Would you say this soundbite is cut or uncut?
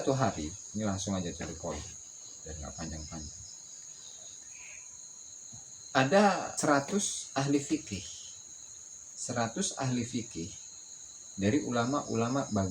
cut